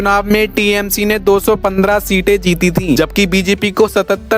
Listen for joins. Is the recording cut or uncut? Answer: cut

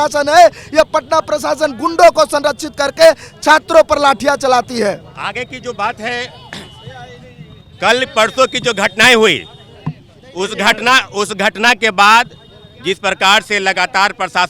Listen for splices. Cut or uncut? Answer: uncut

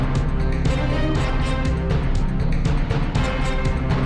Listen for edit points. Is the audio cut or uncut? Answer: cut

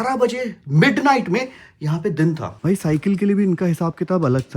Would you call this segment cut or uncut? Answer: cut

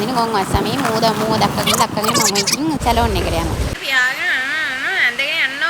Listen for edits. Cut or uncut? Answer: cut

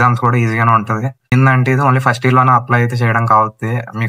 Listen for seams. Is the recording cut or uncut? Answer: cut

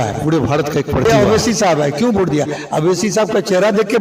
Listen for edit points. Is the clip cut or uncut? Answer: cut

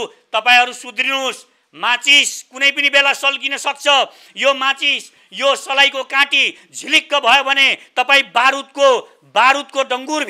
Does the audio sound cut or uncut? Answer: uncut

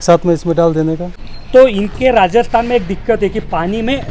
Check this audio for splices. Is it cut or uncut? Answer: cut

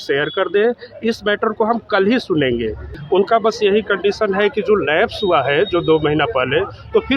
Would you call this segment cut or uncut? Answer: cut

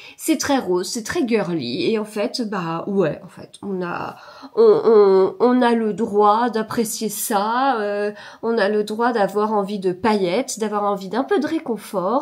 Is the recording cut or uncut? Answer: uncut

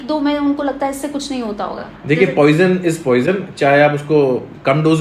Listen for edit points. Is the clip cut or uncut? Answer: uncut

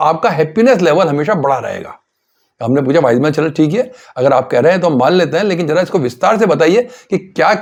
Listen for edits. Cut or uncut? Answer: uncut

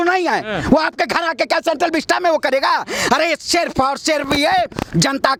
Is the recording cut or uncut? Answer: uncut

